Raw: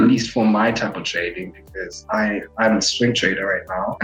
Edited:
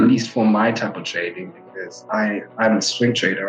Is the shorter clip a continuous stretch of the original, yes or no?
yes